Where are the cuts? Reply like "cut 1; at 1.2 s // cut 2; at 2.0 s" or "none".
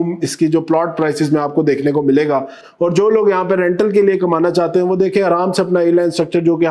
none